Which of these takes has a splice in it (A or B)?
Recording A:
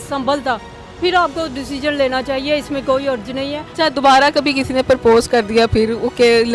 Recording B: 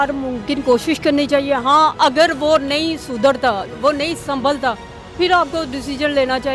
A